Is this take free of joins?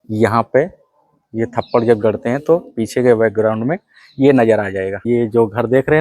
no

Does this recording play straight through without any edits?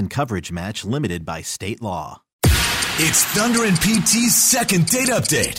no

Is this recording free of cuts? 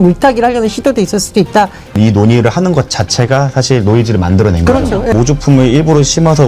no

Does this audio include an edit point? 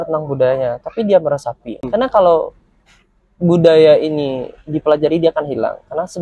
yes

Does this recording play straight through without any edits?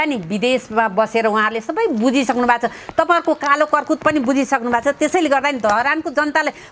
yes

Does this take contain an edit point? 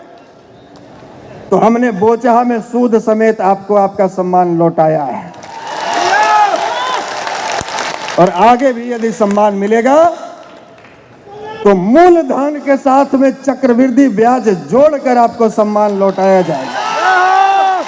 no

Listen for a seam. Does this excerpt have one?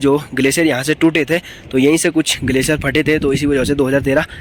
no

